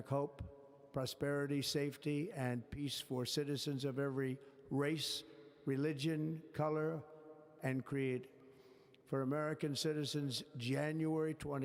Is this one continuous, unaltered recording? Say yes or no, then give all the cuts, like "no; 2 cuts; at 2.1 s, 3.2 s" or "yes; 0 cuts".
yes; 0 cuts